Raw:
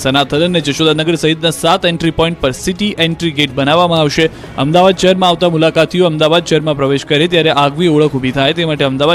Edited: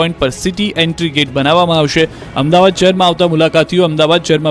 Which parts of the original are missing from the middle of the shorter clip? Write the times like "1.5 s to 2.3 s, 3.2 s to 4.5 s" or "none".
none